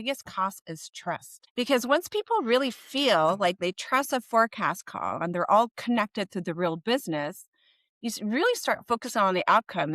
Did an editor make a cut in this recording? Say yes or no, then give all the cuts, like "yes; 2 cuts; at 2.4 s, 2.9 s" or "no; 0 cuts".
yes; 2 cuts; at 1.4 s, 3.6 s